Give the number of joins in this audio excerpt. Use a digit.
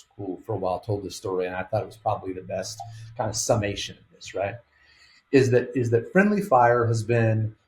0